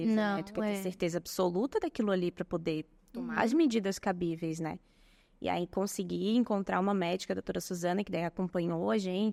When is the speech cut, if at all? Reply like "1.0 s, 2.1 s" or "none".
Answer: none